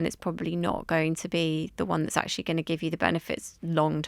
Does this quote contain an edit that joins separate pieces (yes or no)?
no